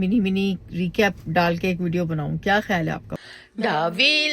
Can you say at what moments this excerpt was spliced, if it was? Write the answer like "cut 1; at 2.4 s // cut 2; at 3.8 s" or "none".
cut 1; at 3.1 s